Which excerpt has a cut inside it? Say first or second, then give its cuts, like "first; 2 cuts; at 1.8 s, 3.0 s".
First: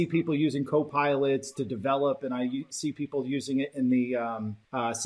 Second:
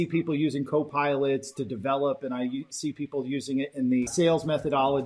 second; 1 cut; at 4.1 s